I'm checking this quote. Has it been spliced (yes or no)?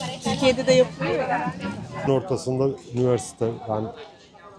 yes